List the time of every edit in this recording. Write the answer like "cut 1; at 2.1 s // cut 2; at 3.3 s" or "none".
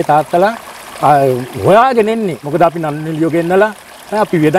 cut 1; at 2.4 s